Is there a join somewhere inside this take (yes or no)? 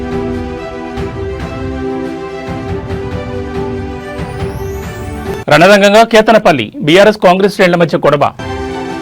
no